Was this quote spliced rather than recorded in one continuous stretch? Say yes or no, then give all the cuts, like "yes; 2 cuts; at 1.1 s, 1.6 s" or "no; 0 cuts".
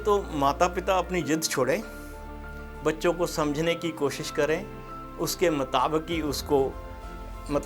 no; 0 cuts